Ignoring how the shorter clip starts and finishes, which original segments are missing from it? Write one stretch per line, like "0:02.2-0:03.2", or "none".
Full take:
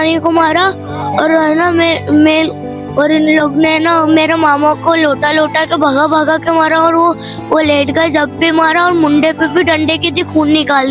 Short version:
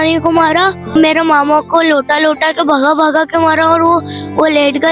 0:00.9-0:04.0